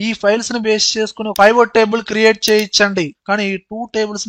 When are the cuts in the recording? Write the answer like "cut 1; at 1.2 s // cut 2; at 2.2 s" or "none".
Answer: cut 1; at 3.1 s

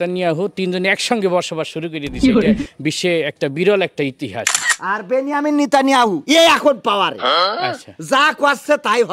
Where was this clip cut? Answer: cut 1; at 2.0 s // cut 2; at 2.9 s // cut 3; at 4.7 s

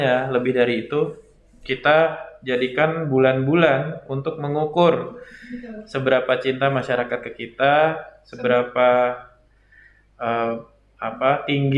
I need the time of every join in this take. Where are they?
none

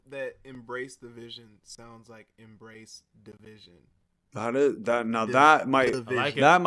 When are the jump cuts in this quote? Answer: cut 1; at 4.2 s

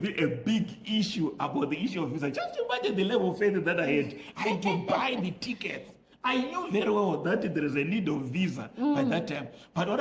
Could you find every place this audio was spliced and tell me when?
none

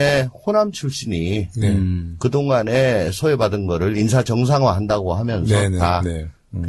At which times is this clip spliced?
none

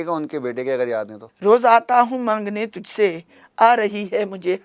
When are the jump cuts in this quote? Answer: cut 1; at 1.2 s

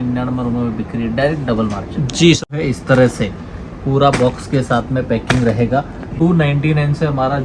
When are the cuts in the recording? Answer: cut 1; at 2.5 s // cut 2; at 6.1 s

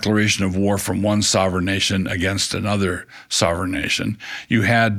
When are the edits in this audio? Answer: none

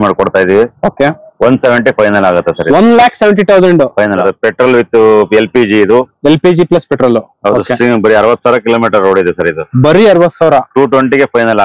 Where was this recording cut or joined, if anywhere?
cut 1; at 4.2 s

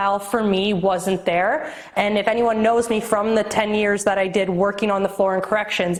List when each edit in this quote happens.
none

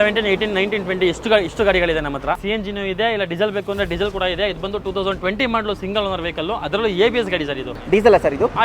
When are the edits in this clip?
cut 1; at 2.4 s // cut 2; at 7.7 s

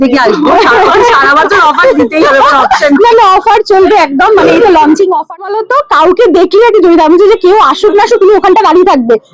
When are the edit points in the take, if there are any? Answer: cut 1; at 5.4 s

